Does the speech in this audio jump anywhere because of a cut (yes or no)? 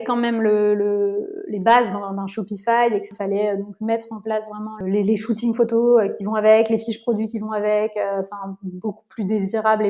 yes